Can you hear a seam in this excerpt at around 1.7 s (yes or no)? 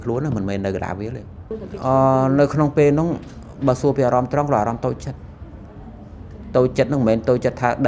yes